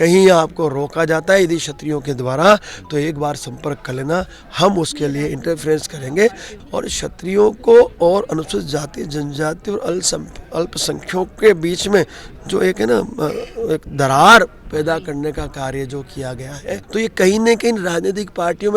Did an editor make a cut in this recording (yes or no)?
yes